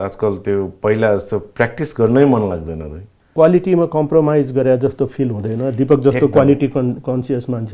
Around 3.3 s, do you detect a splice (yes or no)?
yes